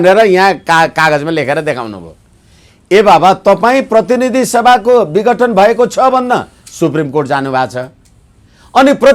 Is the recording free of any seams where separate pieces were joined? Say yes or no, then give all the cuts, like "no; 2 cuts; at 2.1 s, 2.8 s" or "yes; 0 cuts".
yes; 0 cuts